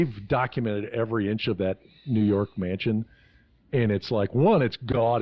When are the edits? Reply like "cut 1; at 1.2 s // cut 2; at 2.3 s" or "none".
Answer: none